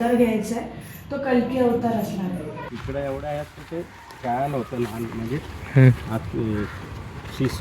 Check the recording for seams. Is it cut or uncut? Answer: cut